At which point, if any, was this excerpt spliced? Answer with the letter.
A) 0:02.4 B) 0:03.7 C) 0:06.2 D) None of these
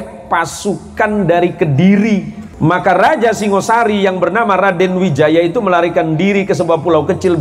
A